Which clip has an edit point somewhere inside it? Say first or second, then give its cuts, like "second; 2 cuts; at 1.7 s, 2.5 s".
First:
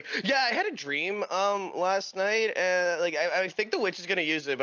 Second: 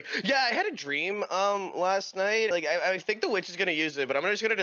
second; 1 cut; at 2.5 s